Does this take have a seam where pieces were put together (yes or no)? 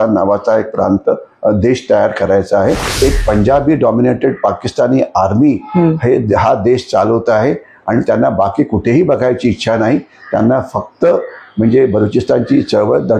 yes